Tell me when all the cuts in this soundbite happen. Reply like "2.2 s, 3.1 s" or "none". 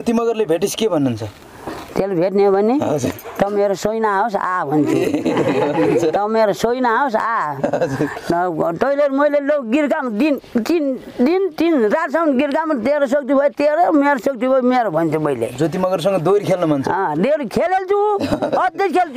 none